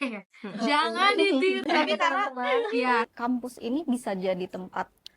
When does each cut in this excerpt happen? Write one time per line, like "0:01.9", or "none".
0:01.7
0:03.1